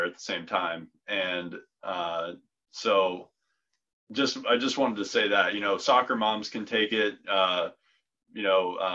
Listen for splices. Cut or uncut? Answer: uncut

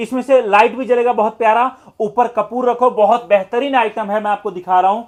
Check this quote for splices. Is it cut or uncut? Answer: uncut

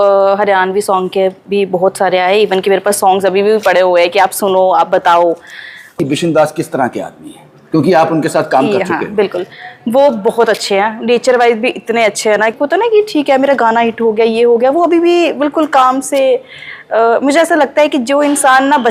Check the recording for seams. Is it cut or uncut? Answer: cut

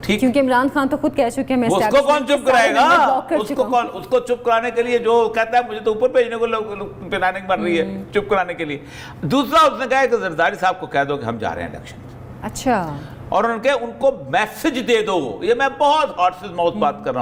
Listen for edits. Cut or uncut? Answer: uncut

